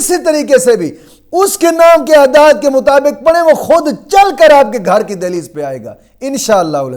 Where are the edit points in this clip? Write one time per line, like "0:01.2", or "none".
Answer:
none